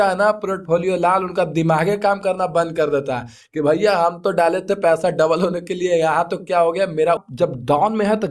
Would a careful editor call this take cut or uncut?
cut